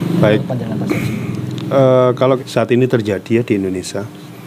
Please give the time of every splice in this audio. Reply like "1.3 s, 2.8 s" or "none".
2.4 s